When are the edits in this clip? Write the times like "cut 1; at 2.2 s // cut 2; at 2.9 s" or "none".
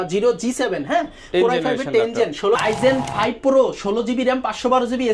cut 1; at 2.6 s